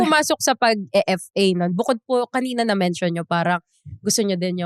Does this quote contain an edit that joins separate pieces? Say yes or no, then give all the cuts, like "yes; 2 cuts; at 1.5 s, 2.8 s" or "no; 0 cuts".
no; 0 cuts